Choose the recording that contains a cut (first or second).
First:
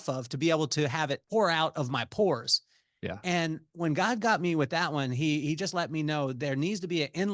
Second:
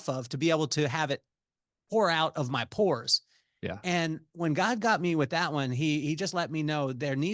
first